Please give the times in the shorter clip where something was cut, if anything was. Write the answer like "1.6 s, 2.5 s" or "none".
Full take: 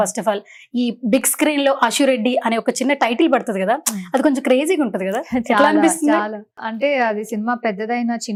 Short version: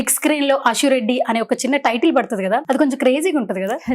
2.6 s